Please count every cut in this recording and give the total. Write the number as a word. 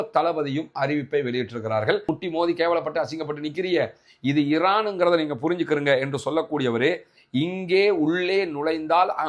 one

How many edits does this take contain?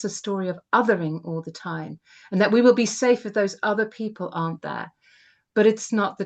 zero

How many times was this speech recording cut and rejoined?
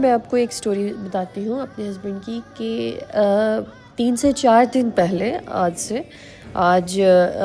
zero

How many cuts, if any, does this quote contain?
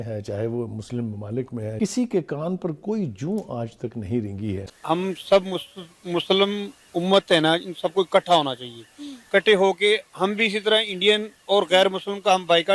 two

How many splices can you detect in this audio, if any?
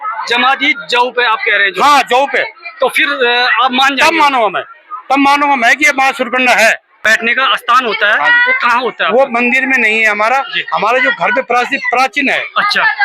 one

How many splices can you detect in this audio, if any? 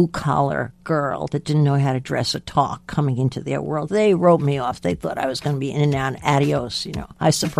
zero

